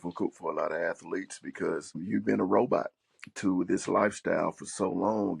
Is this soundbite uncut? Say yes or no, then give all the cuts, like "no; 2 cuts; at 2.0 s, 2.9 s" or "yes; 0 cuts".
no; 1 cut; at 2.0 s